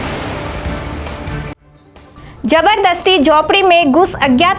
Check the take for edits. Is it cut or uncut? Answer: uncut